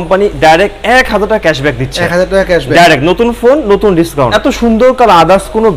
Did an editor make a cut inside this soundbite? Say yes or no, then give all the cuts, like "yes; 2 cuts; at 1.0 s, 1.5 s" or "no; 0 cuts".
yes; 1 cut; at 4.3 s